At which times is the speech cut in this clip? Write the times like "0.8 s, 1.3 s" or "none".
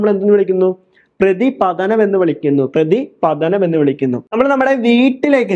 4.2 s